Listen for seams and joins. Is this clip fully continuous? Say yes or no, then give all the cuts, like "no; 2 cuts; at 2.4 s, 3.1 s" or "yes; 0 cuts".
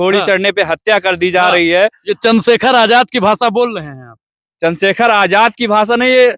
yes; 0 cuts